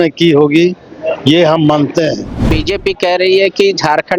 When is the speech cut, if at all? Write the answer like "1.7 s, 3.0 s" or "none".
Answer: 2.6 s